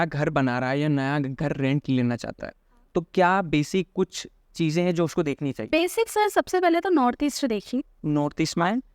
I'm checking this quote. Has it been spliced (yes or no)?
no